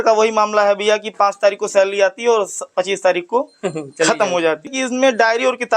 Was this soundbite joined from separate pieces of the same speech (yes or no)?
yes